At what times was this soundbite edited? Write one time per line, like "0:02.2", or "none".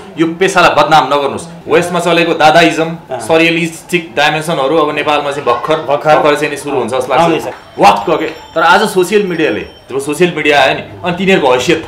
0:01.5
0:07.5